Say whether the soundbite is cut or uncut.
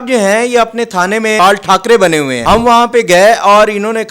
cut